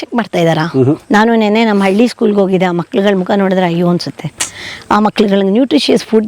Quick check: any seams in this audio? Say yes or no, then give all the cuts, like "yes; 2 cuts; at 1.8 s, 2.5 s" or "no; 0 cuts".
yes; 1 cut; at 1.0 s